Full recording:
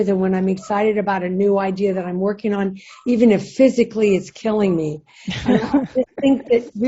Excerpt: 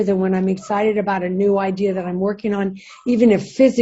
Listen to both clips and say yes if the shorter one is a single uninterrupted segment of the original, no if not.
yes